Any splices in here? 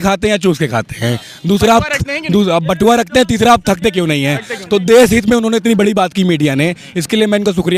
no; 0 cuts

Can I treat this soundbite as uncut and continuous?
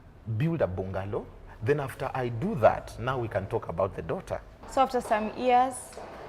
no; 1 cut; at 4.6 s

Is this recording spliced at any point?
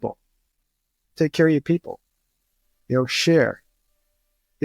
no; 0 cuts

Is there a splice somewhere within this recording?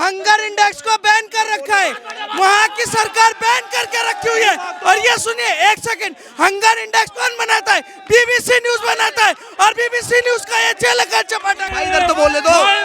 yes; 1 cut; at 11.6 s

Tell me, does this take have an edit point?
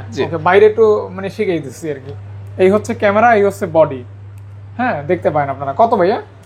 yes; 1 cut; at 2.0 s

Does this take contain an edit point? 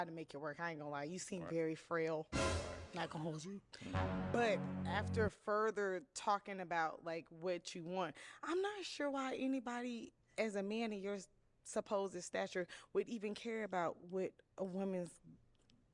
no; 0 cuts

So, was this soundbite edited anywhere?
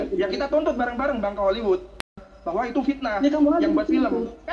yes; 1 cut; at 2.3 s

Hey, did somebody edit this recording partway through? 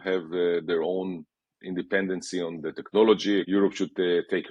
yes; 1 cut; at 3.5 s

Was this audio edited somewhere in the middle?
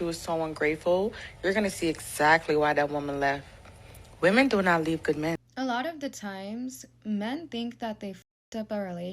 yes; 1 cut; at 5.3 s

